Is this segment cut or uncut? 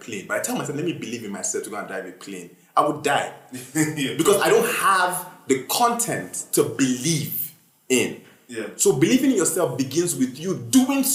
uncut